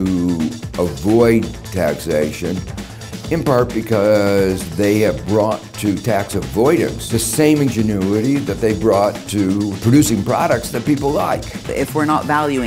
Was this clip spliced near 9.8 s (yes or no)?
yes